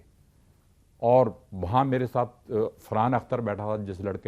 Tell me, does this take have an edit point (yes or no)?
no